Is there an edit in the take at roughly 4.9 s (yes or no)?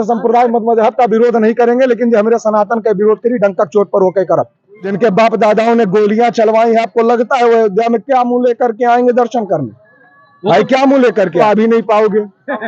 yes